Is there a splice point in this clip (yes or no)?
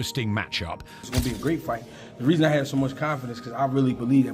yes